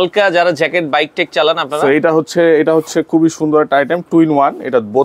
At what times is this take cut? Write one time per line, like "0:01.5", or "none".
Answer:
none